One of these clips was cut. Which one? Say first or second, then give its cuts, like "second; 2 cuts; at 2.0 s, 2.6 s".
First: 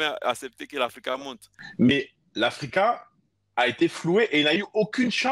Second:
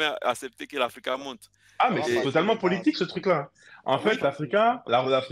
first; 1 cut; at 1.6 s